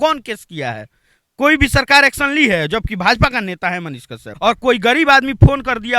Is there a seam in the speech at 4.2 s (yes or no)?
yes